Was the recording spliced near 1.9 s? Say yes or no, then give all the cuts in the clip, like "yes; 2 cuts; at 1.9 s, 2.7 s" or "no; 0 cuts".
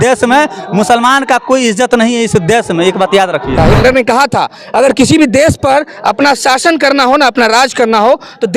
no; 1 cut; at 3.6 s